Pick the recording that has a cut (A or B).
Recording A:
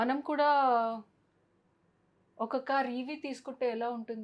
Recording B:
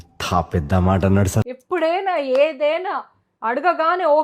B